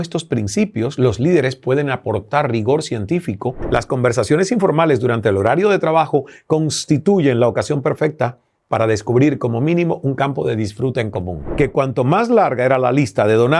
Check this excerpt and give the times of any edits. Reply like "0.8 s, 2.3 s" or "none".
3.6 s, 11.4 s